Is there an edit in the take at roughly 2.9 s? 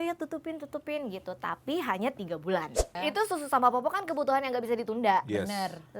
yes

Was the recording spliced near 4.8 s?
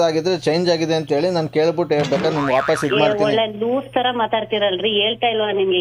no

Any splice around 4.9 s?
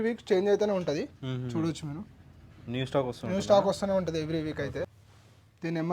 yes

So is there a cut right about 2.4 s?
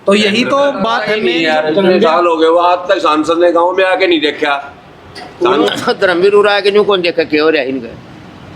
no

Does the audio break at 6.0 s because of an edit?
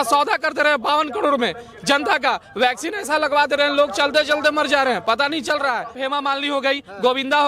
yes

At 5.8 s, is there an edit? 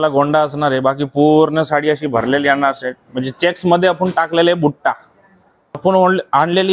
yes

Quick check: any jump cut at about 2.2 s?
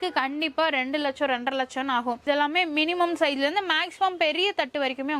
yes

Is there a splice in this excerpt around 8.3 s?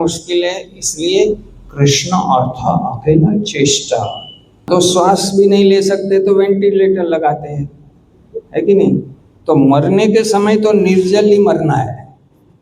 no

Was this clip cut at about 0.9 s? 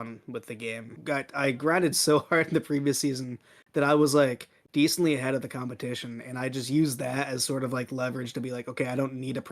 yes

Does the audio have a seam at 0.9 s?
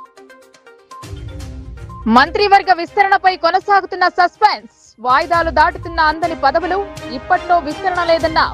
yes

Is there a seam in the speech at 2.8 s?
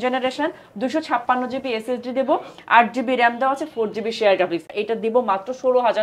no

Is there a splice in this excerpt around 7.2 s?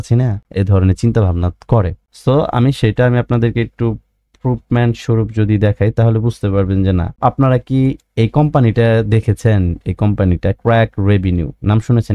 yes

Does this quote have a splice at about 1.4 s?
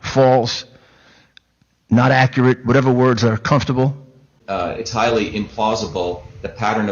no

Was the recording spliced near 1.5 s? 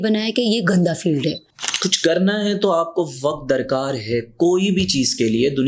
yes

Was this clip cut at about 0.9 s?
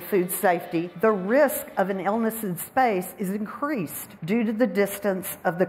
yes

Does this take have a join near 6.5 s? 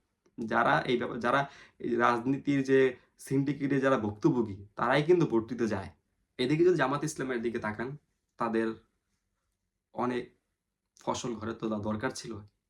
yes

